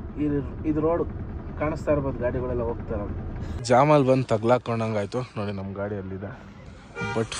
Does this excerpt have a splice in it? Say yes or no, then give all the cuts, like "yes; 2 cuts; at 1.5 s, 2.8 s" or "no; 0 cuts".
yes; 1 cut; at 3.6 s